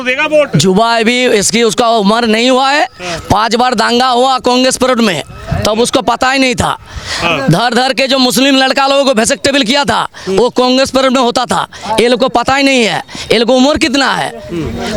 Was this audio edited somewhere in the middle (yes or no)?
no